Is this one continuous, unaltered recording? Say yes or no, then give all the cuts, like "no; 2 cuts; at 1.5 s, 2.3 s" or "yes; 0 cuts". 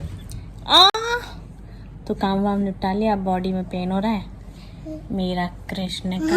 yes; 0 cuts